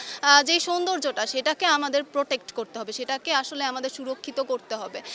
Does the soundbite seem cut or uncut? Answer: uncut